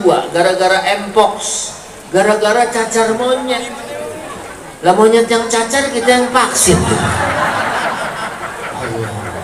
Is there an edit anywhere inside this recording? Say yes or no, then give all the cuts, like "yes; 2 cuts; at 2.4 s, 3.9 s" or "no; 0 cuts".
no; 0 cuts